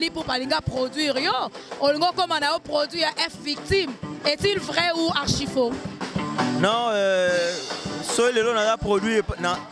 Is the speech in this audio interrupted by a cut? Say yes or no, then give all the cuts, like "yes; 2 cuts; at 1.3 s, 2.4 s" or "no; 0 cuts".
no; 0 cuts